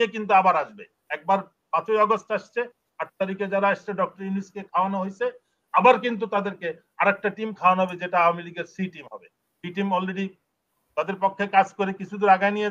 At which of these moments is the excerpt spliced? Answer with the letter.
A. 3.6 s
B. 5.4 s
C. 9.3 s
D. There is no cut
D